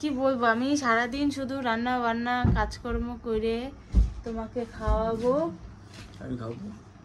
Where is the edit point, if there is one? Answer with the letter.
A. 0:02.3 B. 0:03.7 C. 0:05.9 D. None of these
D